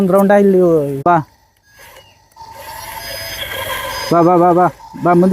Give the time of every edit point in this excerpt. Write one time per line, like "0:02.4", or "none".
0:01.0